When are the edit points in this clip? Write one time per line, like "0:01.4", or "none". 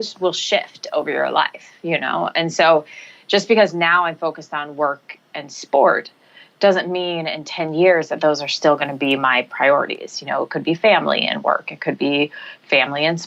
none

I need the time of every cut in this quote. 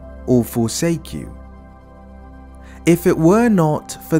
0:01.3
0:02.8

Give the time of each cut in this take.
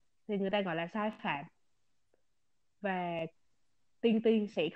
none

